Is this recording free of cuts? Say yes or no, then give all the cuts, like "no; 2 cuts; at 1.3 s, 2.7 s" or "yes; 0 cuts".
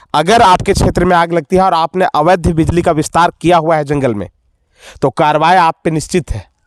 yes; 0 cuts